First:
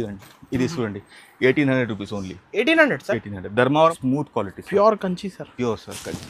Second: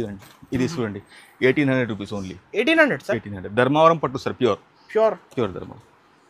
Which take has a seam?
first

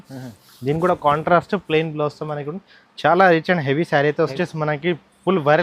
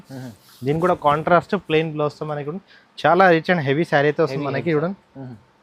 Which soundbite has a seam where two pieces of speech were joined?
first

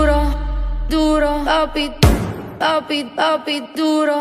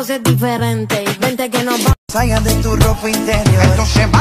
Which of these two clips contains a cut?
second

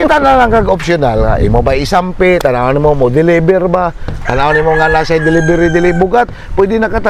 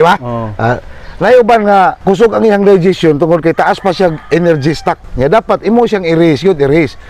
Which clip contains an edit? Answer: second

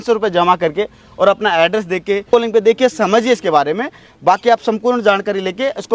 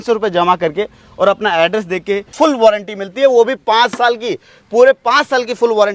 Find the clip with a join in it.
second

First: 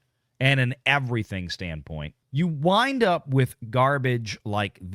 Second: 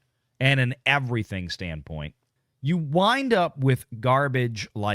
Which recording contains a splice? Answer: first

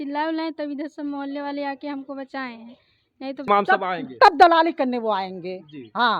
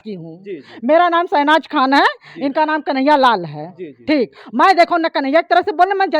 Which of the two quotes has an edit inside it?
first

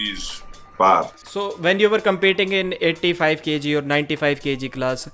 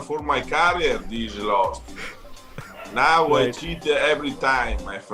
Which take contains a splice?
first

